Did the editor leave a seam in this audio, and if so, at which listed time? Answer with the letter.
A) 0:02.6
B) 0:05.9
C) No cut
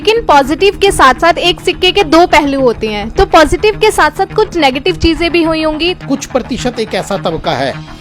B